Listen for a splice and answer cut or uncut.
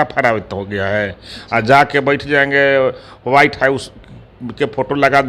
uncut